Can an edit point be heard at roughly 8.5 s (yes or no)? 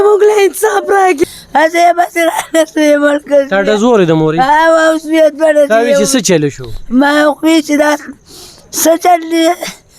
no